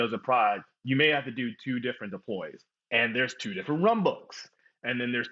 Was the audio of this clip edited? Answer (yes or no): yes